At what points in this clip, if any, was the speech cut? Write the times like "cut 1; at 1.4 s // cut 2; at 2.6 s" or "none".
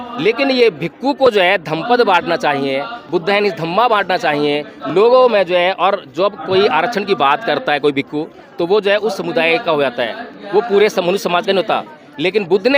none